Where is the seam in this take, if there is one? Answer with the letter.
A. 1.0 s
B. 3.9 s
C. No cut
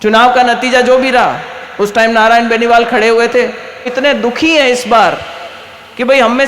B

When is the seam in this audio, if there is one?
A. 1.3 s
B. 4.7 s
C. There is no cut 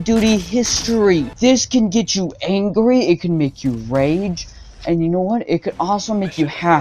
A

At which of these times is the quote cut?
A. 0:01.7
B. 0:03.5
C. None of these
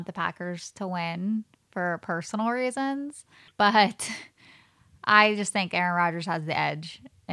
B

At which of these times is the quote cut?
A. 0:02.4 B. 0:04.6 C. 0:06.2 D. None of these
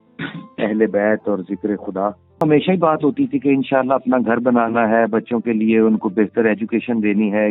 A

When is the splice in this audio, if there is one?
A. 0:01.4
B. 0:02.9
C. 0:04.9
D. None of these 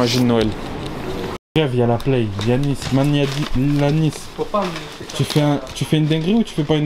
A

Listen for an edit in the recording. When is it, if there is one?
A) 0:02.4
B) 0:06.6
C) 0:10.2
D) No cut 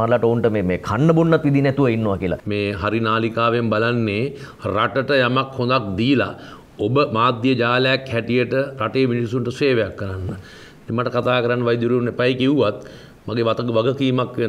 A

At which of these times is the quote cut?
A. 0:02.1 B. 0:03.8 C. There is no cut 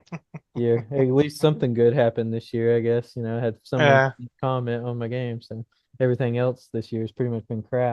C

